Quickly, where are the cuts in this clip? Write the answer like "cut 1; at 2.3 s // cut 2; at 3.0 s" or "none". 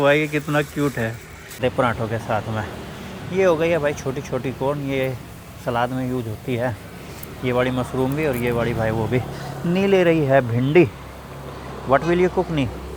cut 1; at 1.6 s